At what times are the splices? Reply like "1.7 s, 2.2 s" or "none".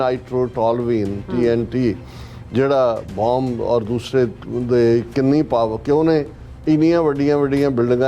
none